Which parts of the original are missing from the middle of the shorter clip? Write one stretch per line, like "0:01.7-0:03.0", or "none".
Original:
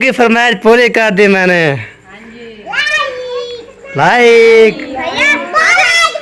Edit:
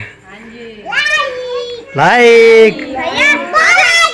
0:03.6-0:03.8